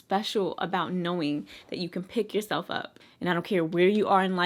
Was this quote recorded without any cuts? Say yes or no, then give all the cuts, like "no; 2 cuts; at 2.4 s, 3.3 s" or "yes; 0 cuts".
yes; 0 cuts